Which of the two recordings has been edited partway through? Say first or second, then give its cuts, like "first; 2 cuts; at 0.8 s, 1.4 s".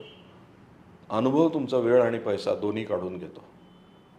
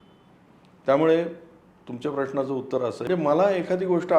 second; 1 cut; at 3.1 s